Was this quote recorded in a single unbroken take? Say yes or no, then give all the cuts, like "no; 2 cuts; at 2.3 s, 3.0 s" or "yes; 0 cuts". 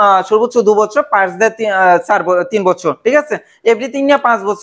yes; 0 cuts